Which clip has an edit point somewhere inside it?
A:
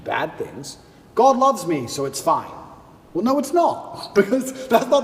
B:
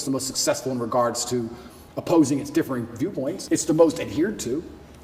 B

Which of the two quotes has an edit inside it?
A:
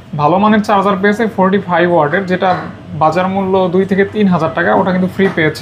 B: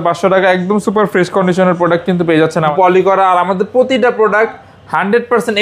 B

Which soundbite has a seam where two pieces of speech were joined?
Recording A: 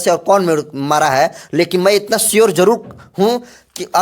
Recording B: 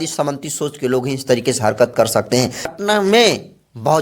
B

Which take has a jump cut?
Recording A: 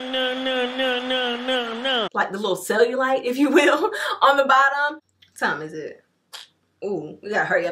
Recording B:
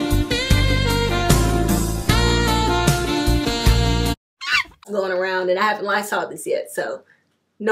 A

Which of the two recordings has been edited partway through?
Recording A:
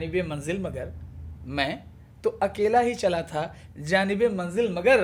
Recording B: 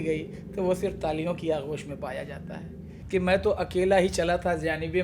B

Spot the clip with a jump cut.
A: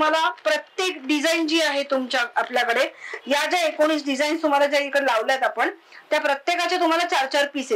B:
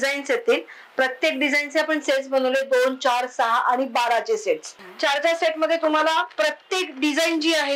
B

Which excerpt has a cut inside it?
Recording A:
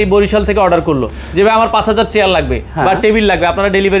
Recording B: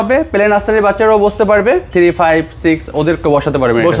B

